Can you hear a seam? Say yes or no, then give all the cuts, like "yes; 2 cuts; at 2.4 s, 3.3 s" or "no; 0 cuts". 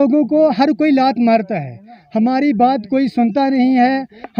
no; 0 cuts